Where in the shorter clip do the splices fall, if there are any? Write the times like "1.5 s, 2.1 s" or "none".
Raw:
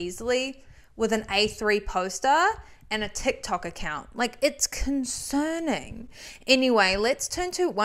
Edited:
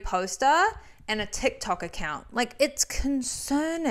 none